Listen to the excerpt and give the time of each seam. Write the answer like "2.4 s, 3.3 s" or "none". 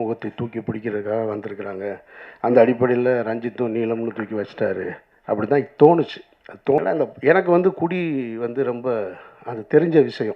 6.8 s